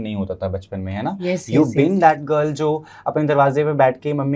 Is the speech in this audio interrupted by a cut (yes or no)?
no